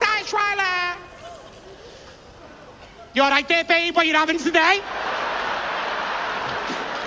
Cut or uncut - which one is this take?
uncut